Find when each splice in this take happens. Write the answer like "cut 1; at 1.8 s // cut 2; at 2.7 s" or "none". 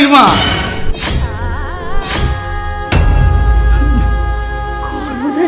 none